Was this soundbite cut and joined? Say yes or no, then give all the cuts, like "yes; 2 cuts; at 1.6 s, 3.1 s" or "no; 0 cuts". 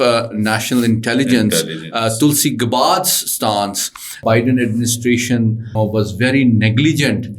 yes; 2 cuts; at 4.2 s, 5.8 s